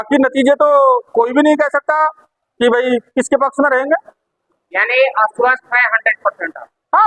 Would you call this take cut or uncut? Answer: uncut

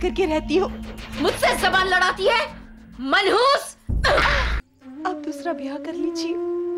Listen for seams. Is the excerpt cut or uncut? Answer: cut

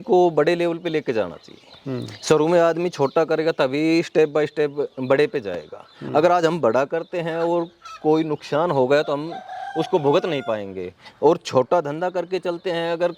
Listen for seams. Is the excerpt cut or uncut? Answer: uncut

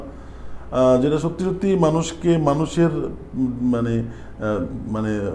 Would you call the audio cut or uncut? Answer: uncut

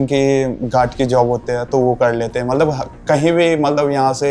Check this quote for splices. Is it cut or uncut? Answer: uncut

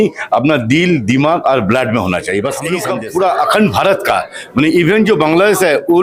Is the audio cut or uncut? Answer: cut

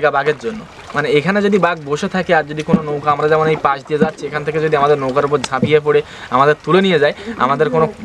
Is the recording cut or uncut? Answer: uncut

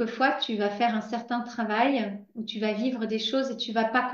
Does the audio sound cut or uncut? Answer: uncut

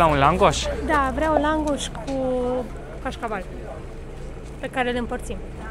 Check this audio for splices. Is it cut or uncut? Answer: uncut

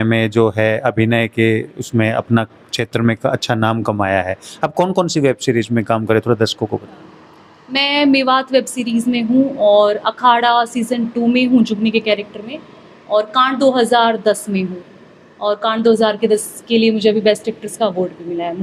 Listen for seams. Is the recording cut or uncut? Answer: uncut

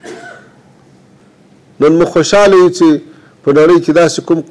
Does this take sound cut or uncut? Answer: cut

